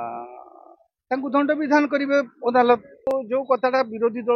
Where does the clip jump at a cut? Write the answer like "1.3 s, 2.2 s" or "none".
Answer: 3.1 s